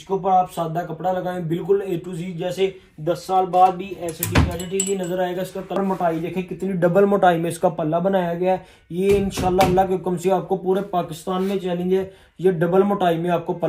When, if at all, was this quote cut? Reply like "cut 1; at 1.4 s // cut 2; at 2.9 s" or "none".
cut 1; at 5.8 s